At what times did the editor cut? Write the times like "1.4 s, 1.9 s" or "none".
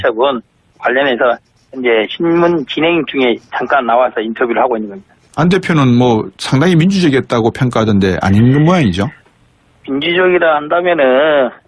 4.8 s